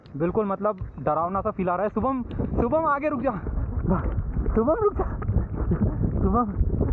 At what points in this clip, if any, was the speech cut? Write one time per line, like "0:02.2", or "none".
none